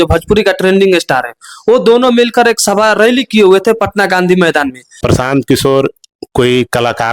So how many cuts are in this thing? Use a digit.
1